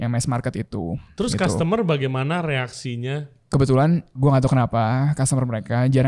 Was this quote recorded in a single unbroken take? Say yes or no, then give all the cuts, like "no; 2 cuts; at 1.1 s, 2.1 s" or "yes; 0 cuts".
yes; 0 cuts